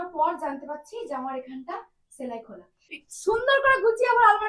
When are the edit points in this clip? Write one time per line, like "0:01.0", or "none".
0:02.9